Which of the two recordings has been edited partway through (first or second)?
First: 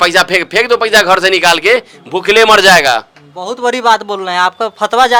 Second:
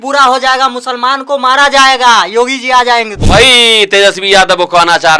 second